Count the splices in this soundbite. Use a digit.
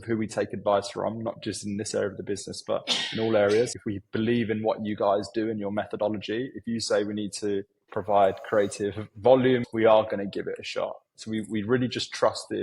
2